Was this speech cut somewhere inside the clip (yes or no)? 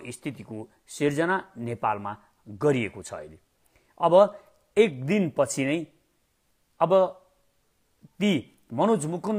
no